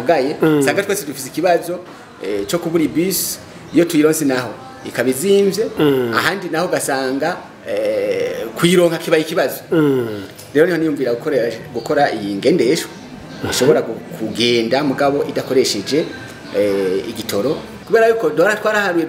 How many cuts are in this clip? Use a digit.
1